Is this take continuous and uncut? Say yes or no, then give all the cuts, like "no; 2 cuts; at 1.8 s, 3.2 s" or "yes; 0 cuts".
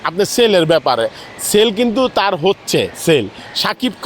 yes; 0 cuts